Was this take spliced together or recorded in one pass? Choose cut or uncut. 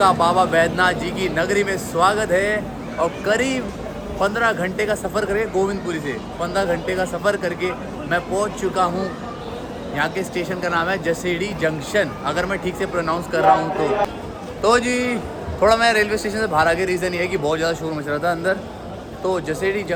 uncut